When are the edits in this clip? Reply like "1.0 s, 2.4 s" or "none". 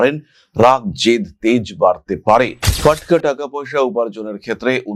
2.7 s